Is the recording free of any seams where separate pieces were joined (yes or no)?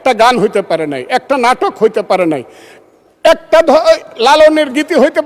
yes